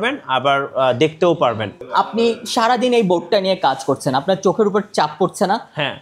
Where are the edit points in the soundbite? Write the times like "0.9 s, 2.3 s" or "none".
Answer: 1.7 s